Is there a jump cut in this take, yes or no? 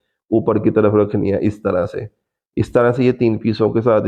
no